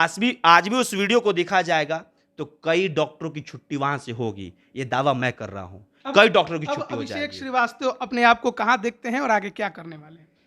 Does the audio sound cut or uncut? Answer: uncut